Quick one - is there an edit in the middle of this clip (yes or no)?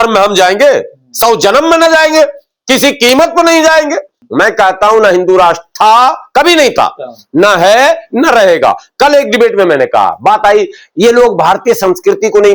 yes